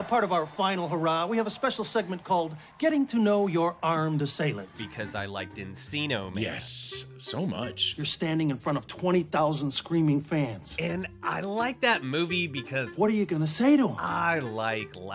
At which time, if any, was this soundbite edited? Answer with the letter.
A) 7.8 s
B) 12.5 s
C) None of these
A